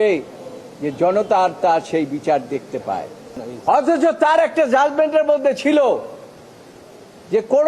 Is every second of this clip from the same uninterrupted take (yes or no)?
no